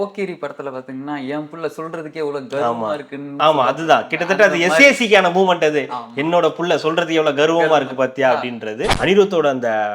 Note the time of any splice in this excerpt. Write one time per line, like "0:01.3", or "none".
0:08.9

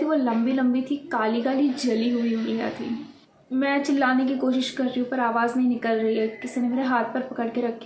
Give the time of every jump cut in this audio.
0:03.3

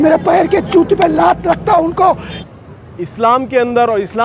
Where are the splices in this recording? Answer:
0:02.4

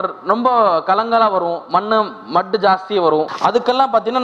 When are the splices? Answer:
0:03.3

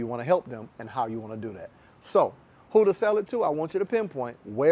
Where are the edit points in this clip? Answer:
none

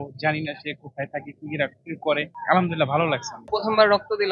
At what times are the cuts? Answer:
0:02.3
0:03.5

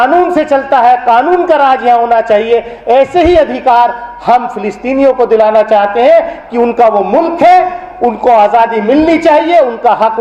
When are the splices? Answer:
none

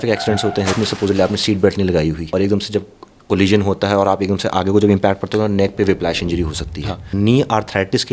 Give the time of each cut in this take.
0:00.8
0:02.2
0:07.1

